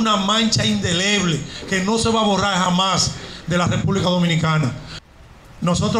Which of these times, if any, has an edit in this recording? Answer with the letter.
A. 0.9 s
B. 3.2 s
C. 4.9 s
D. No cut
C